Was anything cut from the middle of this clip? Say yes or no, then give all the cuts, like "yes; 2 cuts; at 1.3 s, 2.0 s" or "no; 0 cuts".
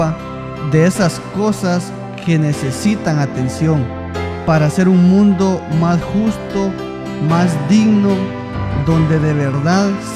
yes; 1 cut; at 3.3 s